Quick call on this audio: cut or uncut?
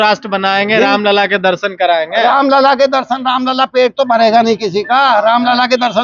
uncut